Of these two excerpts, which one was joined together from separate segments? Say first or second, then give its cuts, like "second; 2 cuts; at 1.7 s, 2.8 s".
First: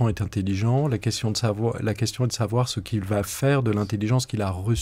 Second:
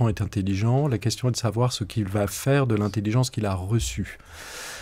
second; 1 cut; at 1.0 s